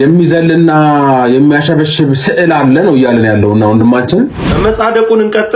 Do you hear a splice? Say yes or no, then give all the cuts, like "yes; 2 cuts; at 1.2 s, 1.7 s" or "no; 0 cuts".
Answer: yes; 1 cut; at 4.4 s